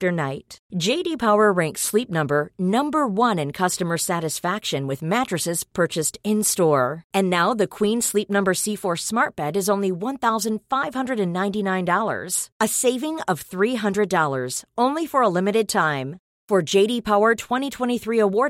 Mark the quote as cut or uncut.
uncut